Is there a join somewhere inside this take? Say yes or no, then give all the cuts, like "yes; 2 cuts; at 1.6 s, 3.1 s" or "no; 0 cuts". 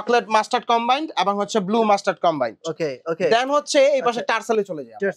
no; 0 cuts